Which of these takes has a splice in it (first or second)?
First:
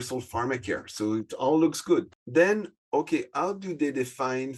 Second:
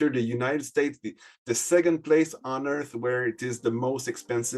first